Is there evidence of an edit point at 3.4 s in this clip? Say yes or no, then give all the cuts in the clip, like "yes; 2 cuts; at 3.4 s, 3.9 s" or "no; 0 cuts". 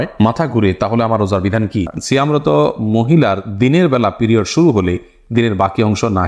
no; 1 cut; at 2.0 s